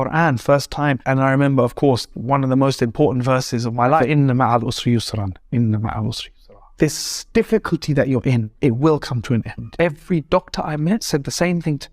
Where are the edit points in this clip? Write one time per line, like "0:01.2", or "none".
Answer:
0:04.0
0:09.7